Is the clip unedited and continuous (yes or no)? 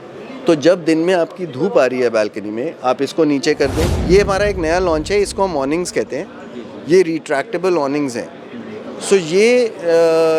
no